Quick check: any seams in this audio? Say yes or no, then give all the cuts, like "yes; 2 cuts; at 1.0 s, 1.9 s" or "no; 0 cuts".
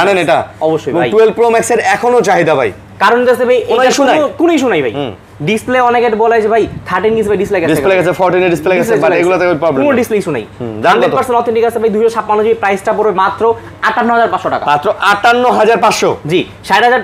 no; 0 cuts